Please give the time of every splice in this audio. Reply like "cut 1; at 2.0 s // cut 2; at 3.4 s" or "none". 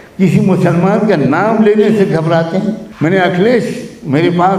cut 1; at 2.9 s